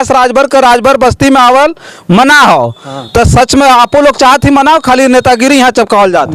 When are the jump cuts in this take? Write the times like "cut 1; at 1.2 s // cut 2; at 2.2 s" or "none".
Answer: none